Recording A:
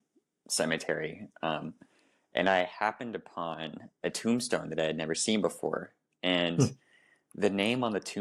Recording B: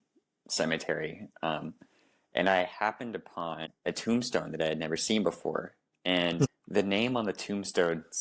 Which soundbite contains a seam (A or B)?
B